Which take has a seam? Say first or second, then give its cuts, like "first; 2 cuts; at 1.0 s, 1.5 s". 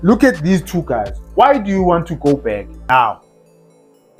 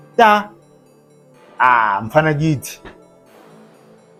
first; 1 cut; at 2.7 s